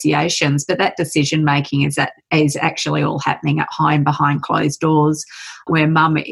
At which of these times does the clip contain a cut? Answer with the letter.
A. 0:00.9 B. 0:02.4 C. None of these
C